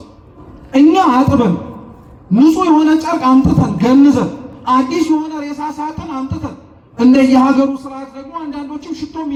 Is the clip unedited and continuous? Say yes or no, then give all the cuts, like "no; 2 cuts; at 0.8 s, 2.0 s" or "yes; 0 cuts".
yes; 0 cuts